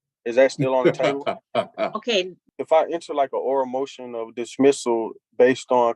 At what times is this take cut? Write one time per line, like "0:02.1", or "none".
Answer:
0:02.4

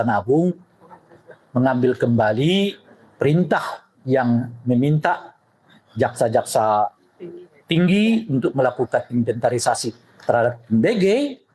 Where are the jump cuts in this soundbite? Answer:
none

